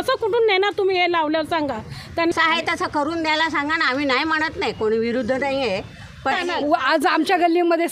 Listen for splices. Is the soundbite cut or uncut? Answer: cut